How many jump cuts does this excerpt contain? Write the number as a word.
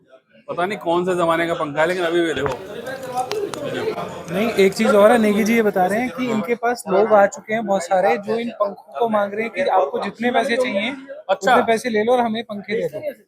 zero